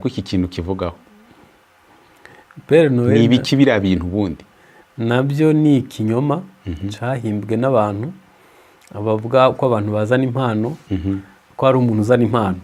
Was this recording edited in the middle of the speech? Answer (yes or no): no